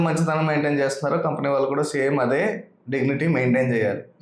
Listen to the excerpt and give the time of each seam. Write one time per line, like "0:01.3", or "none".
none